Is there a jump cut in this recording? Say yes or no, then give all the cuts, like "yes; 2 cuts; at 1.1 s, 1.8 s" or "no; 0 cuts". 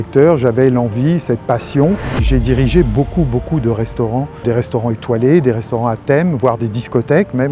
yes; 2 cuts; at 2.2 s, 4.4 s